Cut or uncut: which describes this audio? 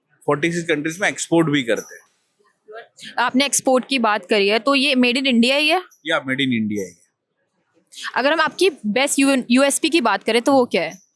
uncut